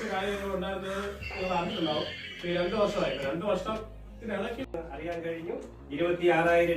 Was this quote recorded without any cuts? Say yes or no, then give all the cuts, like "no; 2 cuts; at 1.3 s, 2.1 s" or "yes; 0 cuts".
no; 1 cut; at 4.6 s